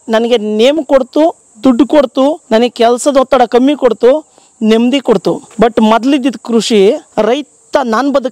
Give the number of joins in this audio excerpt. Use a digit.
3